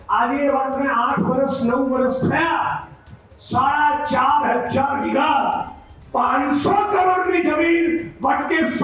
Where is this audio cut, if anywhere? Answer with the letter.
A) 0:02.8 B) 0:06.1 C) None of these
C